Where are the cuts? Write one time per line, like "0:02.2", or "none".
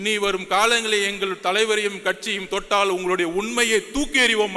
none